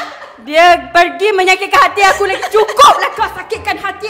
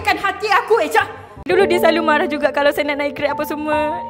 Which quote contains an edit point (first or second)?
second